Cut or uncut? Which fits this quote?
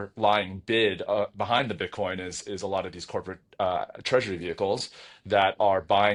uncut